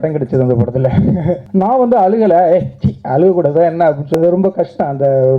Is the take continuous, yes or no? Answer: no